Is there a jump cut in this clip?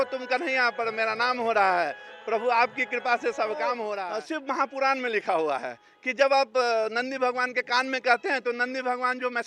yes; 1 cut; at 4.0 s

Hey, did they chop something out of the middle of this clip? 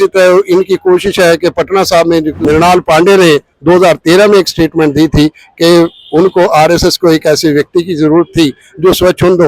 yes; 1 cut; at 2.4 s

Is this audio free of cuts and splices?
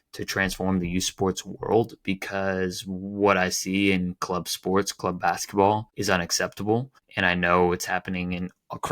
no; 2 cuts; at 5.9 s, 7.0 s

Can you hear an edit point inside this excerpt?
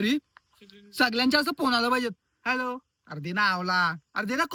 no; 0 cuts

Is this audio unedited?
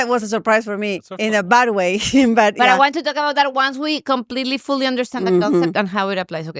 yes; 0 cuts

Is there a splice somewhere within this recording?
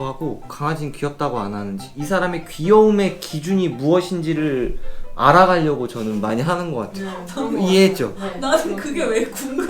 no; 0 cuts

